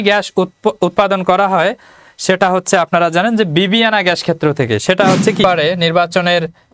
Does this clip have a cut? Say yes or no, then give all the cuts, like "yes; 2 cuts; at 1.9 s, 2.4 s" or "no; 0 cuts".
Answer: yes; 1 cut; at 5.4 s